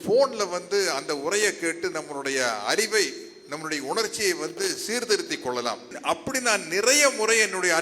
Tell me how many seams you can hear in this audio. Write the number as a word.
one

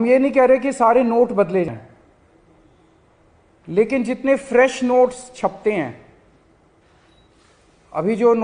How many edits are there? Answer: one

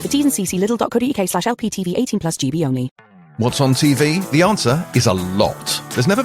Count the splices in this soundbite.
one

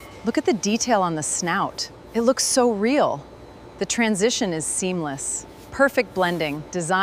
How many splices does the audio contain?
zero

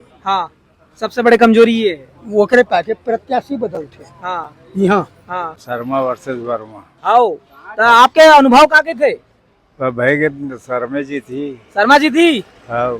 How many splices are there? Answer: one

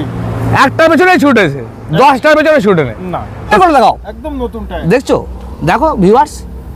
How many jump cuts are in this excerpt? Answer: one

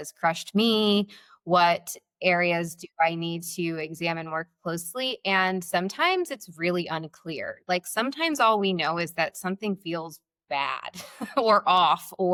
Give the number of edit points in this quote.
zero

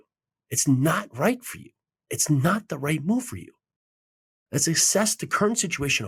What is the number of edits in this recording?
zero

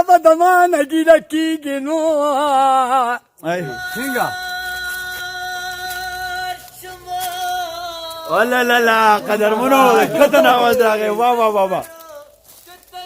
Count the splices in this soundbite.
one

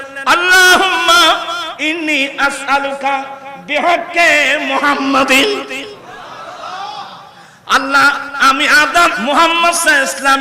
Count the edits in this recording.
one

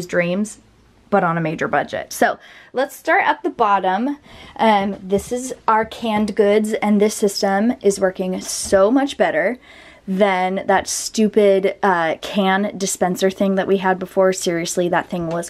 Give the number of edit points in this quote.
zero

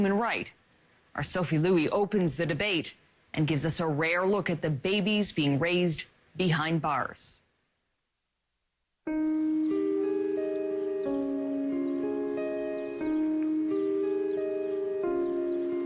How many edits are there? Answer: one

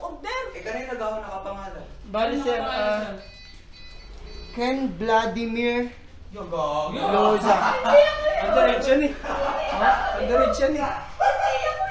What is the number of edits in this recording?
zero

